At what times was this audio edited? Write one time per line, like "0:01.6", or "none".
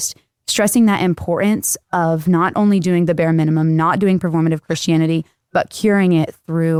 none